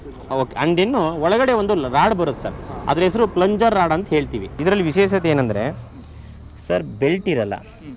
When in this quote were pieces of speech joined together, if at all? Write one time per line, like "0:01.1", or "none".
0:04.5